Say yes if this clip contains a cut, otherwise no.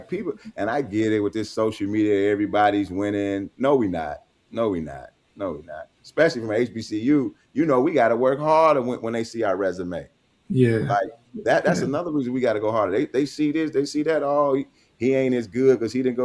no